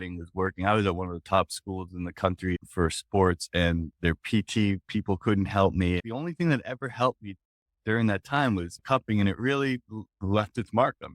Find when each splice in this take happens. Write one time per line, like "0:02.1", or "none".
0:02.6
0:06.0
0:08.8
0:10.2